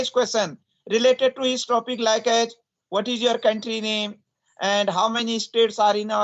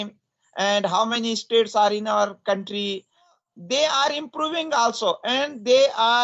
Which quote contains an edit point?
second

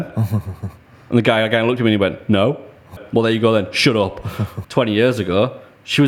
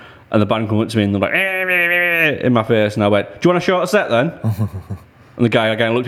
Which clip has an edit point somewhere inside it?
first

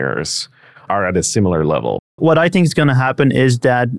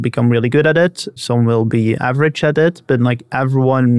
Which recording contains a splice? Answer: first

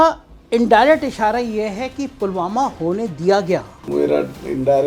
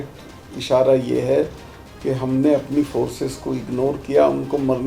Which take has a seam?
first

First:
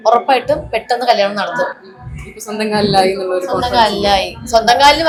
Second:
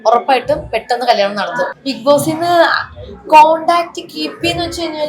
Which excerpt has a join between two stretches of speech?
second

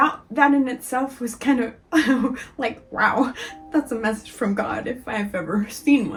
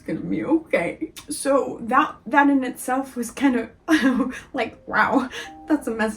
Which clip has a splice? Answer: second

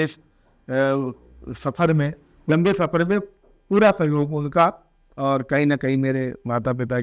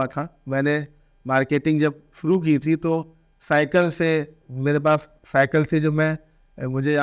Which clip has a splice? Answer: first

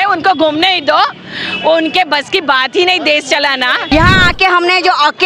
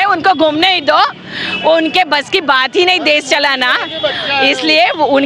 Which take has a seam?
first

